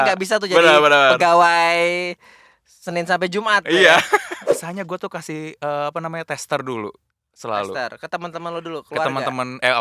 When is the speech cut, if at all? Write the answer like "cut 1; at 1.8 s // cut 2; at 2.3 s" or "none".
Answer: cut 1; at 4.5 s